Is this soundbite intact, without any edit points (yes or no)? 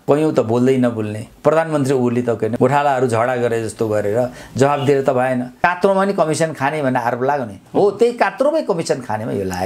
no